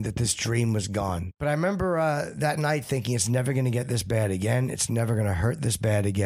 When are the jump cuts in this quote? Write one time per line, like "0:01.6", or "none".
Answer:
0:01.3